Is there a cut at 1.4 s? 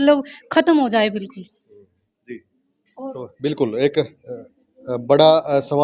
no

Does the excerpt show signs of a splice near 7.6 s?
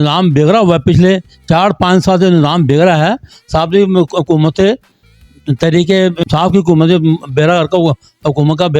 no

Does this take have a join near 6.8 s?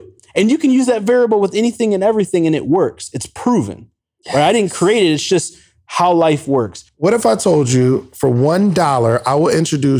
yes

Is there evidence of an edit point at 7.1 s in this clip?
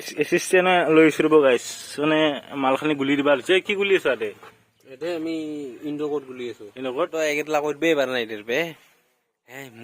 yes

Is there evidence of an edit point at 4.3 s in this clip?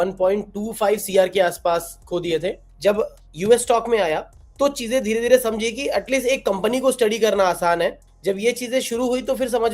no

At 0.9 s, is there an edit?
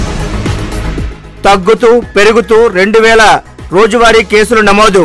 yes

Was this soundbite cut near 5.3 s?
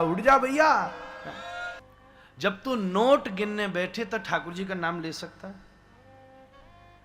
no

